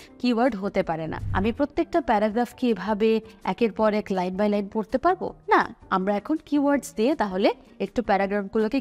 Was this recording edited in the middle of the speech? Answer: yes; 1 cut; at 1.2 s

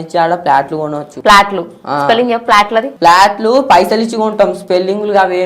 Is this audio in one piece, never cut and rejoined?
no; 2 cuts; at 1.1 s, 2.9 s

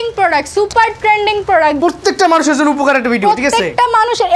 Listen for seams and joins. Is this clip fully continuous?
no; 1 cut; at 1.8 s

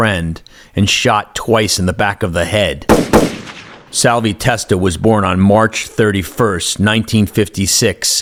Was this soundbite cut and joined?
no; 0 cuts

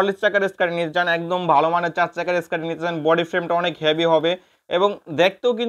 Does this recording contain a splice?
no; 0 cuts

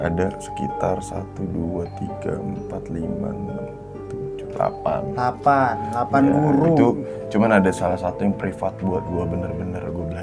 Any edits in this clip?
no; 0 cuts

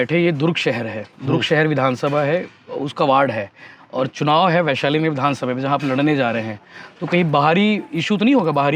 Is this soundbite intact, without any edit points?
yes; 0 cuts

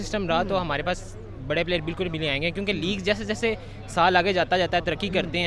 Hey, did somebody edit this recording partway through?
no; 0 cuts

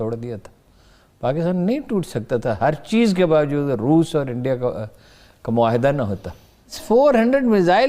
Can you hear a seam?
yes; 1 cut; at 6.8 s

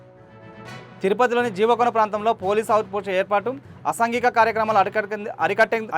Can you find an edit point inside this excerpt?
no; 0 cuts

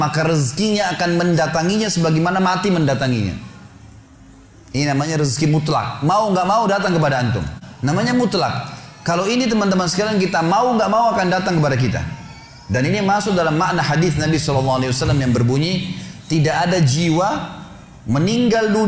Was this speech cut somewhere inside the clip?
yes; 1 cut; at 7.6 s

